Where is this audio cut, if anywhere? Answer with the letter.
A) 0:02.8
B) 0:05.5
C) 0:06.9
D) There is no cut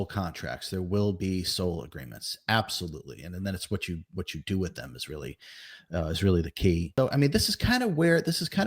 C